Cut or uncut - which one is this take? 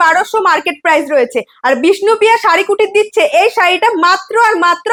uncut